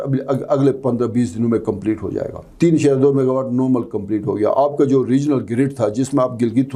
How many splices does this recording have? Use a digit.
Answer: 1